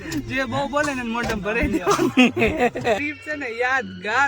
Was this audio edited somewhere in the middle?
yes; 1 cut; at 3.0 s

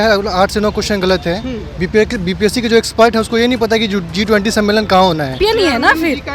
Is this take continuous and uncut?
no; 1 cut; at 5.4 s

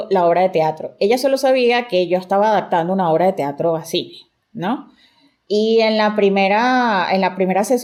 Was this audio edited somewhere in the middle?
no; 0 cuts

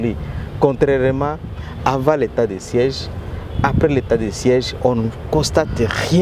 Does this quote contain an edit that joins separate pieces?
no; 0 cuts

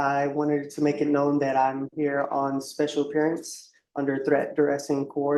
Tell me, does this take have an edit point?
no; 0 cuts

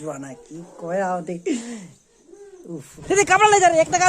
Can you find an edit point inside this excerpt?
yes; 1 cut; at 2.9 s

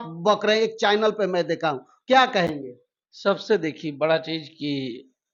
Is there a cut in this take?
no; 0 cuts

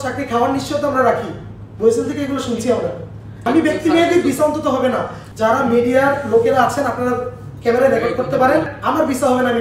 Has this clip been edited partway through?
yes; 3 cuts; at 3.3 s, 5.2 s, 8.7 s

